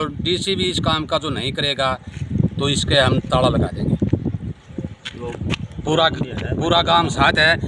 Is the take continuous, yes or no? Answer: yes